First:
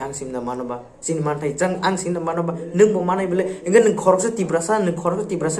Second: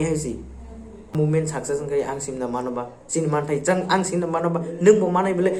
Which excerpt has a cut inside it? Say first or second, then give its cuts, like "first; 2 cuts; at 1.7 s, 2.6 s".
second; 1 cut; at 1.1 s